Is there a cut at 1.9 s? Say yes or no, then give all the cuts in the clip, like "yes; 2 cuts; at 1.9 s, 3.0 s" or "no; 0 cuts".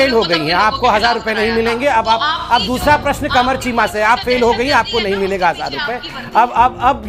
yes; 1 cut; at 1.9 s